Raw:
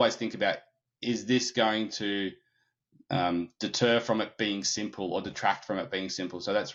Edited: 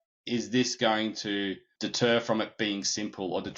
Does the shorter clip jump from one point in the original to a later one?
yes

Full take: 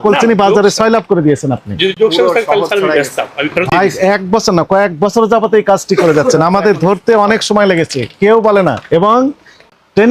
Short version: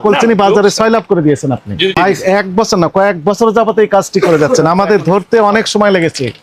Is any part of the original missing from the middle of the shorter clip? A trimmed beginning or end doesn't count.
yes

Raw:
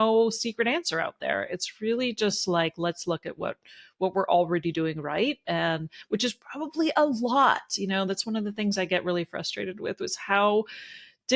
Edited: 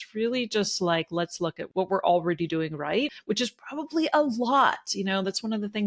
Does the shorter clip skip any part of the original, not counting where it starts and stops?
yes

